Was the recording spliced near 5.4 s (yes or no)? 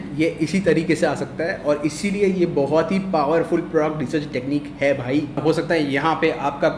yes